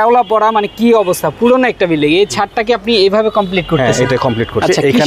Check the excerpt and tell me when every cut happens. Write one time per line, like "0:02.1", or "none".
none